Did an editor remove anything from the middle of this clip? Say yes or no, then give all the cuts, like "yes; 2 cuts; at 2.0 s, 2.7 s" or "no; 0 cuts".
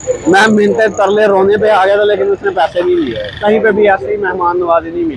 yes; 1 cut; at 3.4 s